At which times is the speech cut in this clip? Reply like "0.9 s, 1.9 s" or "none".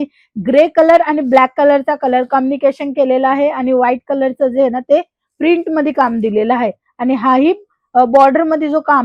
none